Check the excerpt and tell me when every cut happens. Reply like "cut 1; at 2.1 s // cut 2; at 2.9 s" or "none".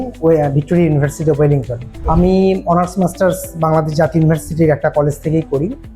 cut 1; at 1.9 s